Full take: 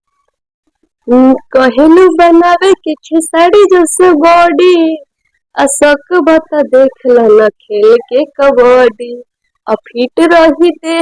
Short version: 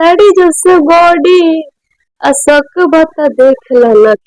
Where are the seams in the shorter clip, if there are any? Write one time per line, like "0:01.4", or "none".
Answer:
none